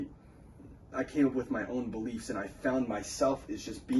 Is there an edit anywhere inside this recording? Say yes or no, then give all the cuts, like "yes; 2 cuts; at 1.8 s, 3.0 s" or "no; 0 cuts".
no; 0 cuts